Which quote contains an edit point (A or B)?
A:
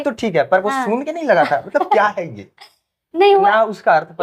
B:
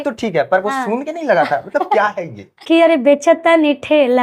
B